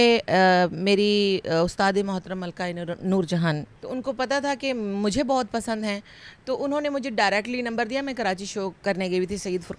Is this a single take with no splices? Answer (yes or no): no